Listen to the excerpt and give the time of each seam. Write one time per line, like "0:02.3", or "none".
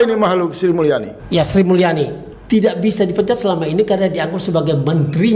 0:01.1
0:02.3